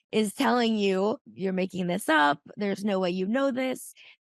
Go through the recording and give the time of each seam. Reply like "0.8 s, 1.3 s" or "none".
1.3 s